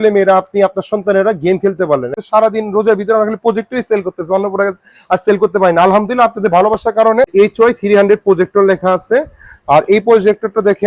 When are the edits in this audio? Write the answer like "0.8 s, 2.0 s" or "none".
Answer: 2.2 s, 7.3 s